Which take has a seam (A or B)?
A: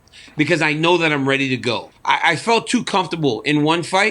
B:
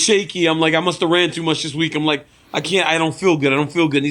A